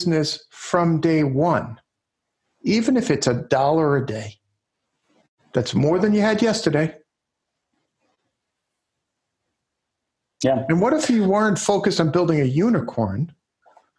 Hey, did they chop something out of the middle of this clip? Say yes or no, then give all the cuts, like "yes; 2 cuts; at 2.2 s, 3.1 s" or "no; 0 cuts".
no; 0 cuts